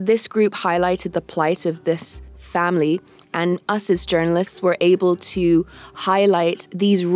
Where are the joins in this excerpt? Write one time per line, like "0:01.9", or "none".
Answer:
none